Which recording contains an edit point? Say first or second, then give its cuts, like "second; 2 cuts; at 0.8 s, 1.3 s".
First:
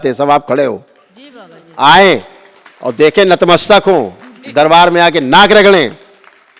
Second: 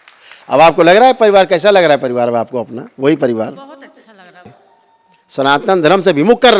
second; 1 cut; at 4.5 s